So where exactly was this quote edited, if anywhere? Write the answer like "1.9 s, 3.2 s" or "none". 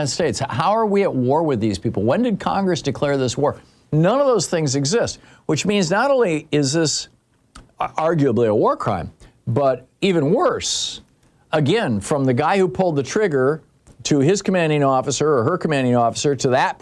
none